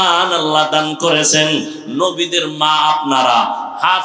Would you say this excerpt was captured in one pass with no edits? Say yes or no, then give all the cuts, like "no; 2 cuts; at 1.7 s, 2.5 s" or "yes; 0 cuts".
yes; 0 cuts